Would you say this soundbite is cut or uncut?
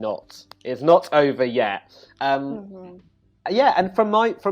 uncut